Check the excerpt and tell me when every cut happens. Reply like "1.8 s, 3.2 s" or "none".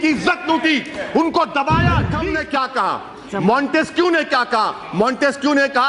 2.3 s

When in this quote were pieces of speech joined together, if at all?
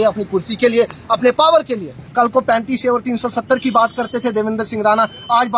1.9 s

